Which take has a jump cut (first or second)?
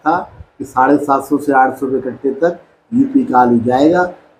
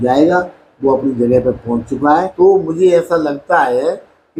second